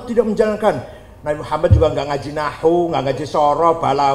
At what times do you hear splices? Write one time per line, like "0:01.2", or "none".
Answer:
none